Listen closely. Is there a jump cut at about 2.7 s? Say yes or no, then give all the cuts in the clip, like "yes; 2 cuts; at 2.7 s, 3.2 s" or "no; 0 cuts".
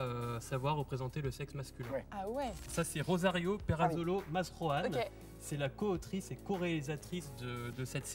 yes; 1 cut; at 2.7 s